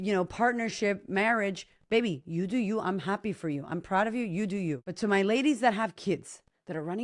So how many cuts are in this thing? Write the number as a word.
one